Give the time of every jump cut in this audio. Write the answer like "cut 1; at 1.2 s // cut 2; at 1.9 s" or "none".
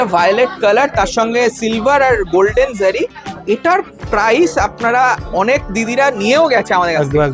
none